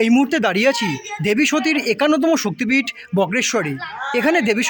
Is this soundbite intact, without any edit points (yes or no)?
yes